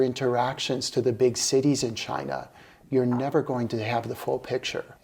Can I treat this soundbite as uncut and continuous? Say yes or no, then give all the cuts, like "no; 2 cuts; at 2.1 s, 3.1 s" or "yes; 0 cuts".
yes; 0 cuts